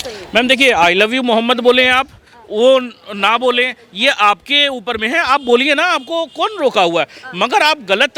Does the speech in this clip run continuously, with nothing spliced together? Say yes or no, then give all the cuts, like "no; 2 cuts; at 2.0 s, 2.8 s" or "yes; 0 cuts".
yes; 0 cuts